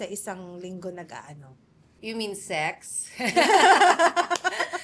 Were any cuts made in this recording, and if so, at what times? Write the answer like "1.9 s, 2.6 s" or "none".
none